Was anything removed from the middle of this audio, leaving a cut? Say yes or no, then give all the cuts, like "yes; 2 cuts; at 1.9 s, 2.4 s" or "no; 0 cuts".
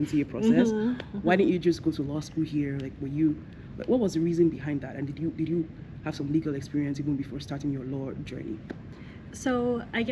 no; 0 cuts